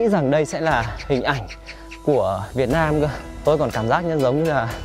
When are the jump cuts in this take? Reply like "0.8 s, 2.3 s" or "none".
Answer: 3.4 s